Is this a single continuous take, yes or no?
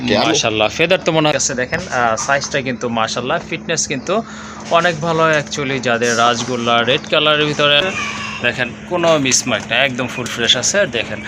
no